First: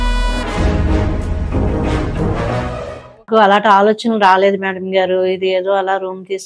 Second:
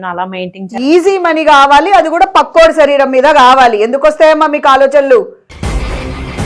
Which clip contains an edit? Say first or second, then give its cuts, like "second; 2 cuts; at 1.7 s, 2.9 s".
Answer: first; 1 cut; at 3.2 s